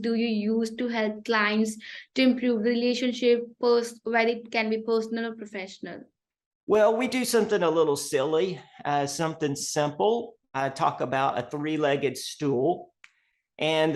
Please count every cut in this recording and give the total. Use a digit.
0